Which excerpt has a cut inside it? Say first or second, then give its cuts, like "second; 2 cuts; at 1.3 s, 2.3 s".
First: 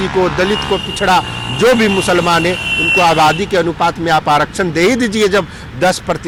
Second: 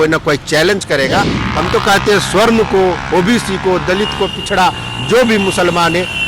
second; 1 cut; at 1.4 s